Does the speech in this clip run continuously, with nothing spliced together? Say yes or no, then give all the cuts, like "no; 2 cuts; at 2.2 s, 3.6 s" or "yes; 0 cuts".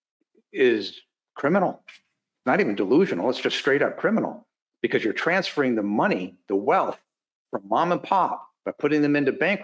yes; 0 cuts